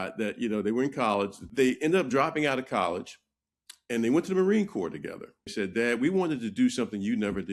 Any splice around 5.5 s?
yes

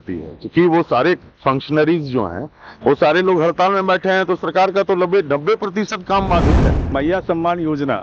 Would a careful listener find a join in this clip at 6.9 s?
yes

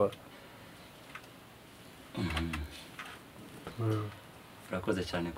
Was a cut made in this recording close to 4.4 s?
no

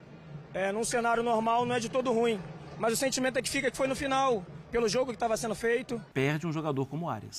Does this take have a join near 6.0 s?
yes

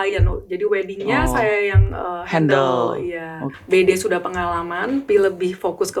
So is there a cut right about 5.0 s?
yes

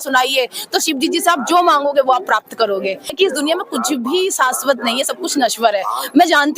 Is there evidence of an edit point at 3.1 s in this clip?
yes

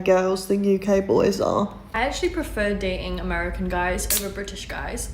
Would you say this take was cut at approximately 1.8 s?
yes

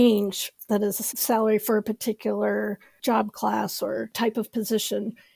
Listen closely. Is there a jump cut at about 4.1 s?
yes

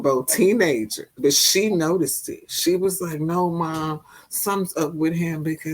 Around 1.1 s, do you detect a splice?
yes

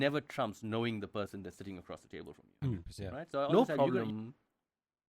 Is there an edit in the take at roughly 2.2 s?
no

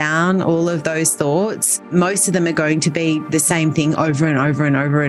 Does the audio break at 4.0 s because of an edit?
no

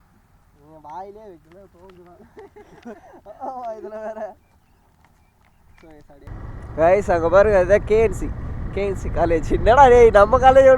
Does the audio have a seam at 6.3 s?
yes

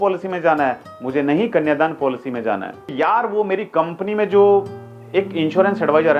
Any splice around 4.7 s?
no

